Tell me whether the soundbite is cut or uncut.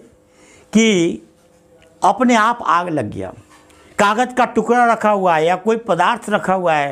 uncut